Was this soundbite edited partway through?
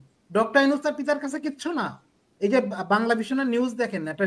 no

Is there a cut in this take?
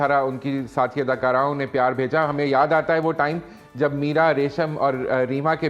no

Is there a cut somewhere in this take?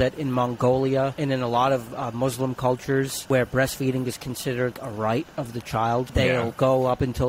yes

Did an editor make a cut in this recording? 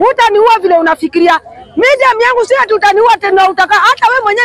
no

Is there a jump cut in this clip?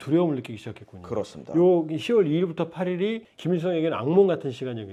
no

